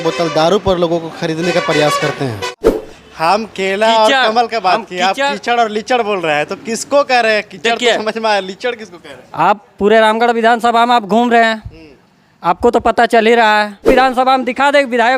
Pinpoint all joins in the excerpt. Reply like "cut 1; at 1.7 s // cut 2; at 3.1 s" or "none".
cut 1; at 2.6 s // cut 2; at 13.9 s